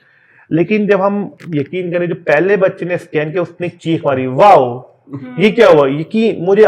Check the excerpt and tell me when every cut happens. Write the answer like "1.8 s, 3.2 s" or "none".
1.3 s